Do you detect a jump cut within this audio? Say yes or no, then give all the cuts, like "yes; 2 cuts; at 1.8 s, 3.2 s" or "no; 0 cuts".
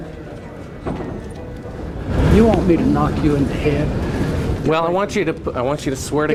no; 0 cuts